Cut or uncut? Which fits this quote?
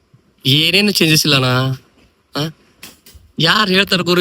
uncut